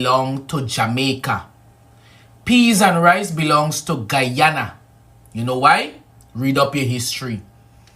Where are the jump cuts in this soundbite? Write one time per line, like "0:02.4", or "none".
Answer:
0:01.5